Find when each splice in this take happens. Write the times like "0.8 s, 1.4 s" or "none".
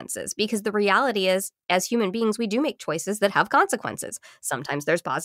none

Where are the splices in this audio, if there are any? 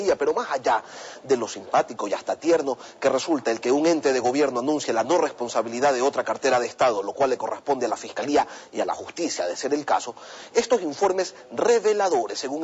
none

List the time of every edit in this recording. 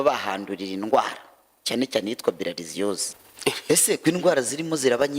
3.0 s

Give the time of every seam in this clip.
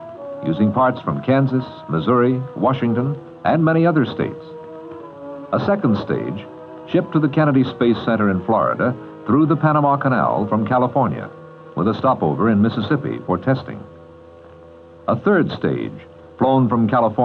none

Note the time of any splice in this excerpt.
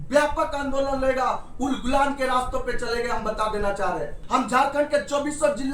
4.2 s

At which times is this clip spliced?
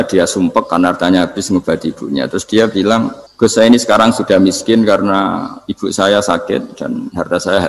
3.2 s

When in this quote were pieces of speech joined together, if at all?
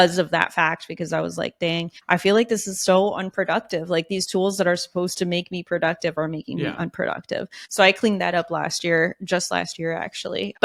none

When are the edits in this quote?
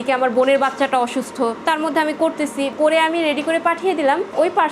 2.7 s

